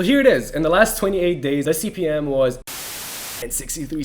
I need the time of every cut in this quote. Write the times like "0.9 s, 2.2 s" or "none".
1.6 s, 3.1 s

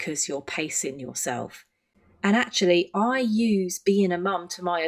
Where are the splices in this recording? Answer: 2.0 s

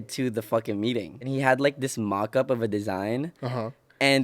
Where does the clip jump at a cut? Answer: 1.3 s

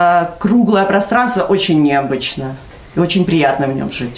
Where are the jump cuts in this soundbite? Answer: none

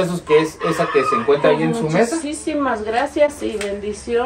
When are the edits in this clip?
none

